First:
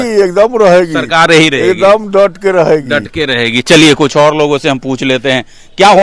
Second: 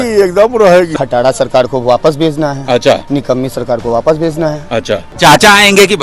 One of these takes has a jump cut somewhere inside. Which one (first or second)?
second